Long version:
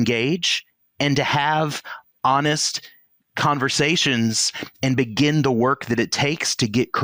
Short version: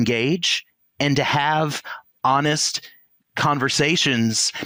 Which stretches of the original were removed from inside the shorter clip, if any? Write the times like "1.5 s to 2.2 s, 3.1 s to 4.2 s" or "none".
none